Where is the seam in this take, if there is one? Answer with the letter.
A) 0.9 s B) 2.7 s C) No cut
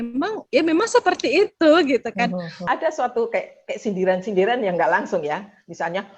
B